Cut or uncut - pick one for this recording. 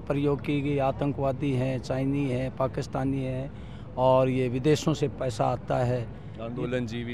uncut